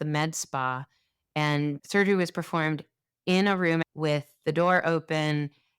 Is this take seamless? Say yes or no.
no